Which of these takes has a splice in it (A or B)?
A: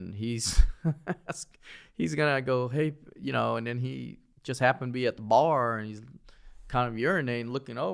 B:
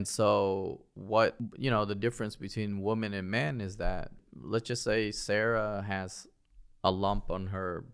B